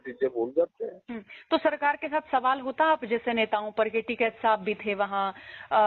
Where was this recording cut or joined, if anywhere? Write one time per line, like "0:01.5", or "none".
none